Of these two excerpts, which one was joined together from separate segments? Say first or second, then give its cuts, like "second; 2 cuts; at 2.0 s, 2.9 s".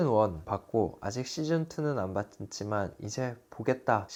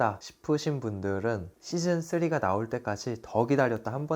second; 1 cut; at 1.5 s